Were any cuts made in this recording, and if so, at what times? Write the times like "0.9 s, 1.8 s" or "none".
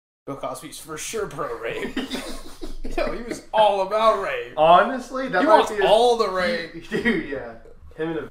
none